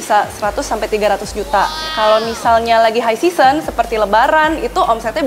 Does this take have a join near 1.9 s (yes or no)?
yes